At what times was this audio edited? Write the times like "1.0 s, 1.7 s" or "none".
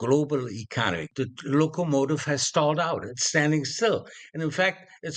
1.1 s